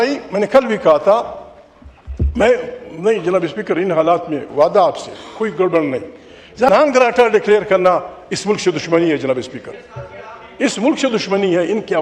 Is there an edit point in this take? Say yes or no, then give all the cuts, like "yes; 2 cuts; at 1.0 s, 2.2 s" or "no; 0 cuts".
yes; 1 cut; at 6.7 s